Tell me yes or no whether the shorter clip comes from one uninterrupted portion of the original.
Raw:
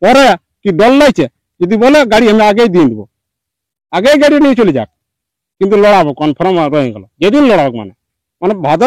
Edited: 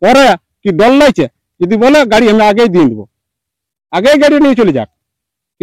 yes